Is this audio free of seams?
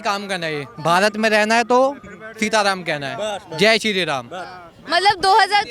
yes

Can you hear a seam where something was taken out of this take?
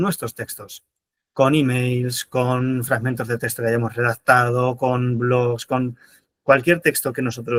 no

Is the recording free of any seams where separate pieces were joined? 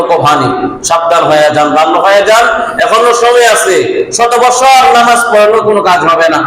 yes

